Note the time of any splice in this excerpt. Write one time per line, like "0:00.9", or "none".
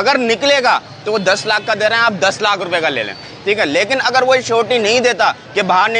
none